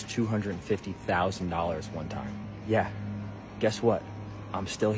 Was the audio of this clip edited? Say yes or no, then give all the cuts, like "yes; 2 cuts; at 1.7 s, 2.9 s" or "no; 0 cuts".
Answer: no; 0 cuts